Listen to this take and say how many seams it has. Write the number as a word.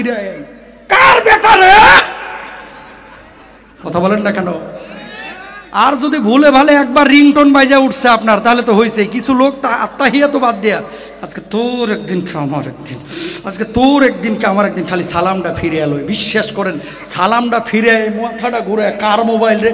zero